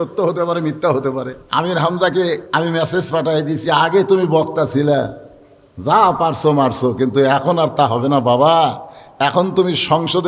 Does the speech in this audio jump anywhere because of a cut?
yes; 2 cuts; at 1.4 s, 2.4 s

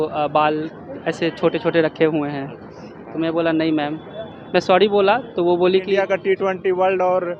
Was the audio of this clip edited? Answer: yes; 1 cut; at 5.9 s

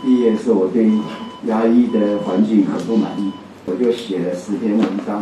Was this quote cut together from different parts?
yes; 1 cut; at 3.7 s

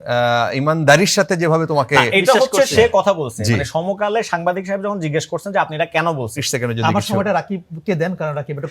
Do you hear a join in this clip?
yes; 1 cut; at 6.3 s

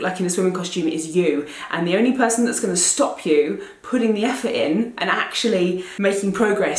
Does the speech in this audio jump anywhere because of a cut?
yes; 1 cut; at 5.9 s

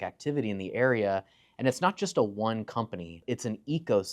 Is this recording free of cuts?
no; 1 cut; at 3.2 s

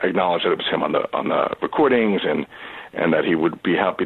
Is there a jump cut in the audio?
no; 0 cuts

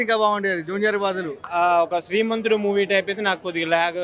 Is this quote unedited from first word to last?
no; 1 cut; at 1.4 s

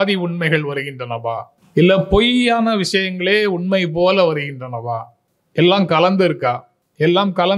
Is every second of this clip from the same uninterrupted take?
yes; 0 cuts

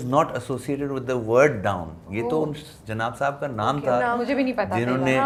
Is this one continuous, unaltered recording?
yes; 0 cuts

